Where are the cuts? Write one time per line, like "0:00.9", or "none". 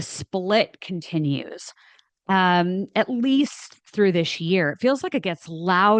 none